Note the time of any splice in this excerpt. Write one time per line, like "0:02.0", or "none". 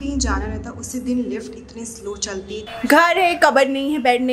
0:02.7

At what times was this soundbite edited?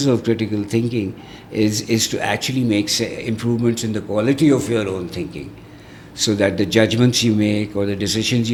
none

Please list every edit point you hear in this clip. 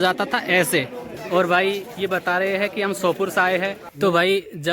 0:01.0
0:03.8

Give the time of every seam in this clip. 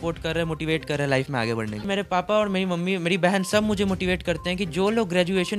0:01.8

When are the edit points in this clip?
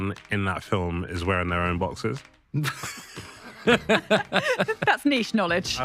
none

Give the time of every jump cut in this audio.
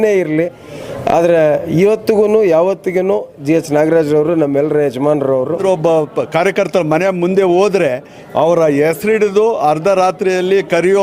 0:05.6

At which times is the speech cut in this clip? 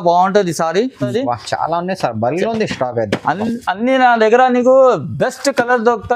0:01.0

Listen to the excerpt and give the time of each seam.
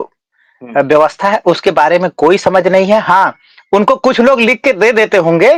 none

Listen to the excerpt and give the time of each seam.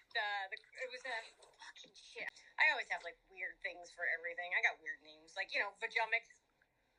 0:02.2

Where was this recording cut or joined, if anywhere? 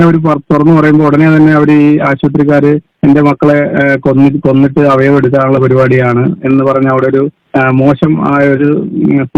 none

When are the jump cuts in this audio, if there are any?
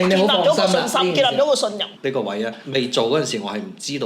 0:01.9

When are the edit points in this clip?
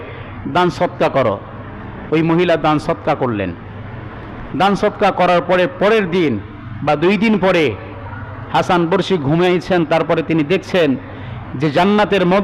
none

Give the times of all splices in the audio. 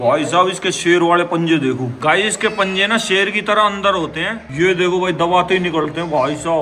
0:01.9

